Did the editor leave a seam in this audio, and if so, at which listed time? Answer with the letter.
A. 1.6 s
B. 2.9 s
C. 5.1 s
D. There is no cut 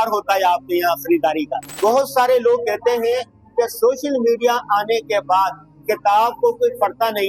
A